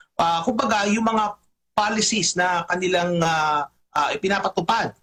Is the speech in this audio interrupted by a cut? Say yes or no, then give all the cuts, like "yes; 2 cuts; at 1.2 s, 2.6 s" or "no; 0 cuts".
no; 0 cuts